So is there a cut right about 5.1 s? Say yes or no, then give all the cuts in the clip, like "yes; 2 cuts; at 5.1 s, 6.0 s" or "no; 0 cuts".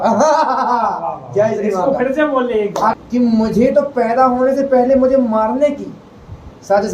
no; 1 cut; at 2.9 s